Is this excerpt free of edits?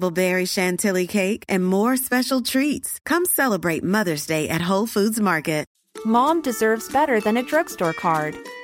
no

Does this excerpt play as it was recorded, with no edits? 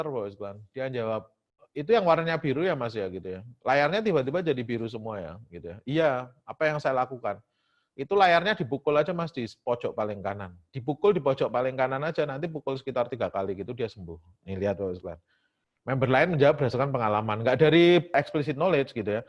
yes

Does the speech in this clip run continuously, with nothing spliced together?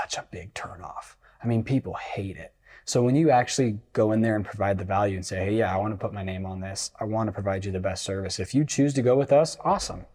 yes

